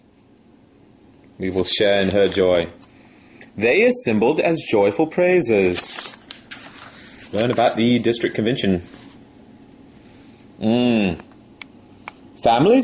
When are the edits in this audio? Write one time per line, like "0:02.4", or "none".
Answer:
none